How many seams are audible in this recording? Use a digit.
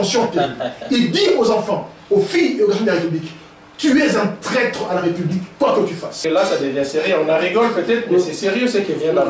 1